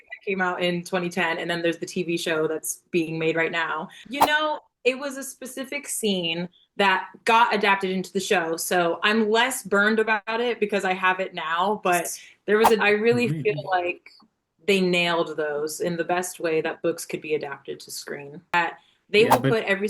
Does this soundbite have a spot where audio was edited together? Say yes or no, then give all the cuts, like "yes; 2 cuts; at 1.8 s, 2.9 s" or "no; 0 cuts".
yes; 3 cuts; at 4.0 s, 12.8 s, 18.5 s